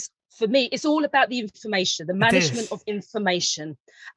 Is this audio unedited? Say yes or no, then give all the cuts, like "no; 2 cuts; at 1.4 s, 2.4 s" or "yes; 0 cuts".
yes; 0 cuts